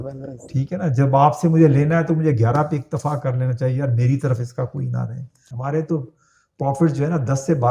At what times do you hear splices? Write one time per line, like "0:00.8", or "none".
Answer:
0:05.4